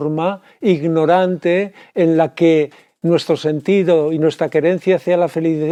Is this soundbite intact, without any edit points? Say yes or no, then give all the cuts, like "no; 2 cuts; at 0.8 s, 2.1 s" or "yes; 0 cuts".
yes; 0 cuts